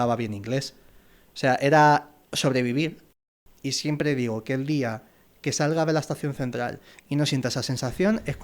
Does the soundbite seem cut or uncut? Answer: cut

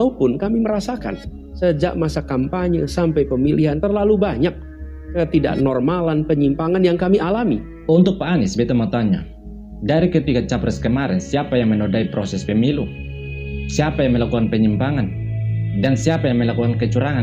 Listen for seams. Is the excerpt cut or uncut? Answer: uncut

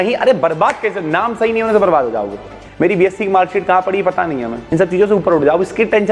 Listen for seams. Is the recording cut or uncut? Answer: cut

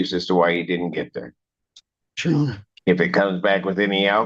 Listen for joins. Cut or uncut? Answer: cut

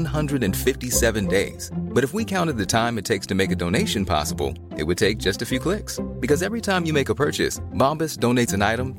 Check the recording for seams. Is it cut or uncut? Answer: uncut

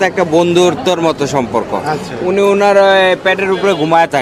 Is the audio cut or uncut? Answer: uncut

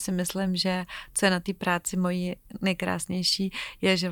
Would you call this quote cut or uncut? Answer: uncut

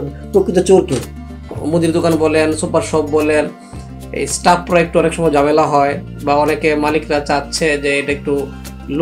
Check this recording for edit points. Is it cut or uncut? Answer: cut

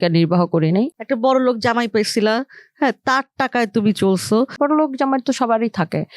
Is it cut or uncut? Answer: cut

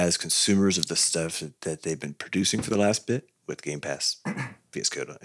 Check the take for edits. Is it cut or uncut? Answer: uncut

